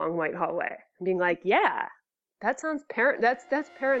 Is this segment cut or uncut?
uncut